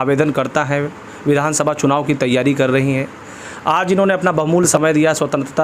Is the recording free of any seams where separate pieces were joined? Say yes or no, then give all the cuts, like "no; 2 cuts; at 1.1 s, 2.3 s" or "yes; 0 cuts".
no; 1 cut; at 4.7 s